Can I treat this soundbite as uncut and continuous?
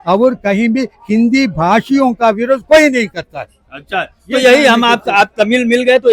yes; 0 cuts

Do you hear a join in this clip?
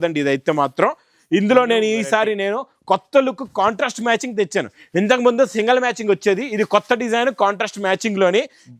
no; 0 cuts

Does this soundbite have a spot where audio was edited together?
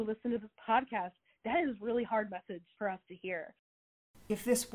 yes; 1 cut; at 3.8 s

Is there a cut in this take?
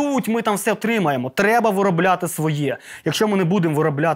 no; 0 cuts

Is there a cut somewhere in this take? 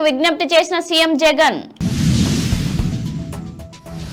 no; 0 cuts

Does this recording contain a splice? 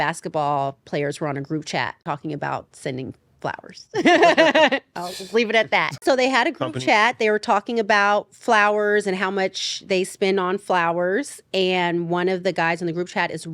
yes; 2 cuts; at 2.0 s, 6.0 s

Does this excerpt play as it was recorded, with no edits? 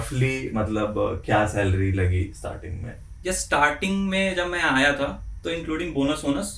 yes; 0 cuts

